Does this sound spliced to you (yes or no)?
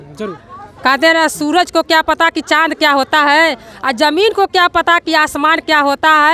no